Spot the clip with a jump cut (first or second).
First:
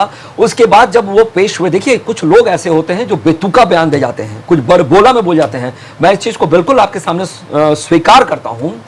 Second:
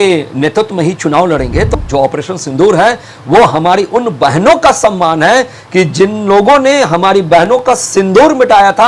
second